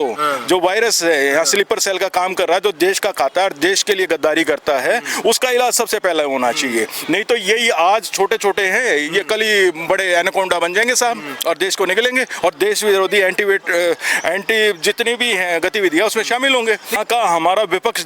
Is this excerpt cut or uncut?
cut